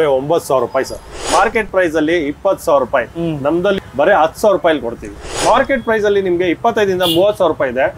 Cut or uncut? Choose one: cut